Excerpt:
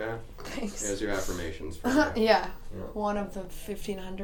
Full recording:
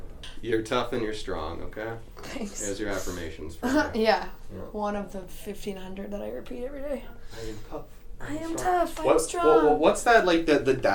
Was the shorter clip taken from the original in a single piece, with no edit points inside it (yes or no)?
yes